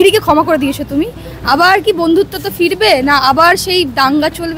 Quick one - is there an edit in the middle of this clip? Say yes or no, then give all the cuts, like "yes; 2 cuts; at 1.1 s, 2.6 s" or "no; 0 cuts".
no; 0 cuts